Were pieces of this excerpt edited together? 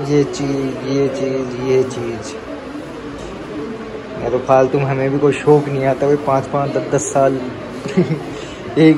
no; 0 cuts

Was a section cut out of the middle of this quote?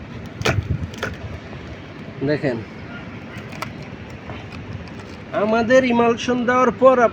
no; 0 cuts

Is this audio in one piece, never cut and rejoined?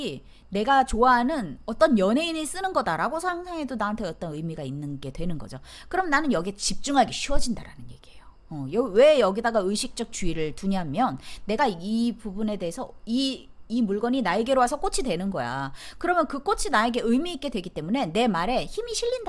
yes; 0 cuts

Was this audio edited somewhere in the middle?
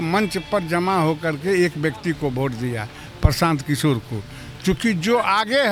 no; 0 cuts

